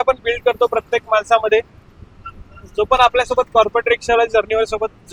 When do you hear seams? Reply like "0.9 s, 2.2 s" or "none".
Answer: none